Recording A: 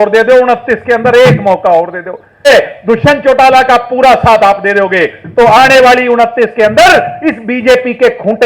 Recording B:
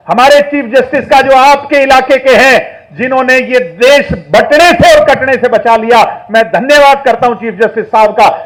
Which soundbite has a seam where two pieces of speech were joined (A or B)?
A